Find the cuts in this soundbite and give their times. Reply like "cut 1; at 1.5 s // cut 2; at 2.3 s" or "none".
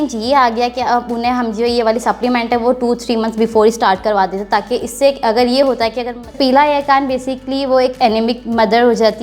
cut 1; at 6.3 s